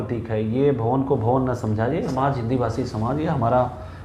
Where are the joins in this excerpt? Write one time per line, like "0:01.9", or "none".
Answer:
0:02.1